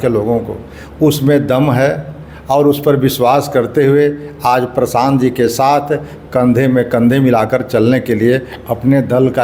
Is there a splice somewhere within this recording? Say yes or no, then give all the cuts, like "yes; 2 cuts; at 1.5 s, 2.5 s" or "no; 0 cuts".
no; 0 cuts